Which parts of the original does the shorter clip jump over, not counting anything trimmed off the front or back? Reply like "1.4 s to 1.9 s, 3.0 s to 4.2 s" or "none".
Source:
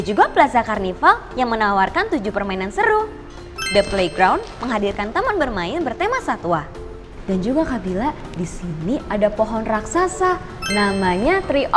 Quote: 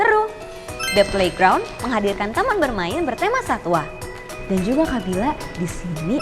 none